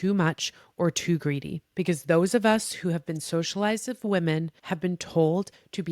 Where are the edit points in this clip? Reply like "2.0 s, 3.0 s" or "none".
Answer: 1.6 s, 4.6 s